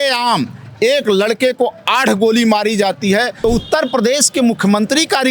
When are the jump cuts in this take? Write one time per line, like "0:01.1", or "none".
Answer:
0:03.3